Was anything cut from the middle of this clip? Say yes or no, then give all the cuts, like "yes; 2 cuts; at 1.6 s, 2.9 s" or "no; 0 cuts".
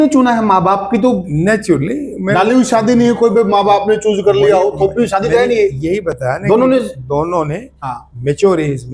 no; 0 cuts